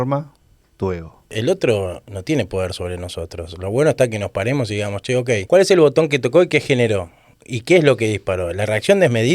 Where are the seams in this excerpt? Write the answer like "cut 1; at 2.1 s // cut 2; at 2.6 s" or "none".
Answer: cut 1; at 1.3 s // cut 2; at 5.4 s